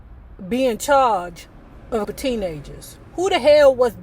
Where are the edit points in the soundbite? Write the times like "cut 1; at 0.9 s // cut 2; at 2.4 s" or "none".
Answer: cut 1; at 2.1 s